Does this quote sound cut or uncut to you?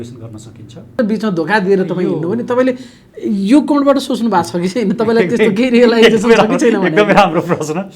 cut